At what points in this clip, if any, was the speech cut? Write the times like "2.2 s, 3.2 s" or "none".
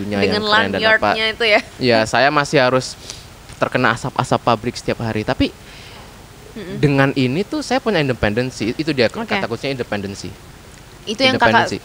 none